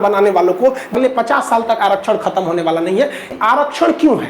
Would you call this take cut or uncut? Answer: cut